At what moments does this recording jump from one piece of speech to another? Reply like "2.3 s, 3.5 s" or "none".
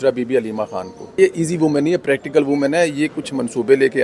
1.1 s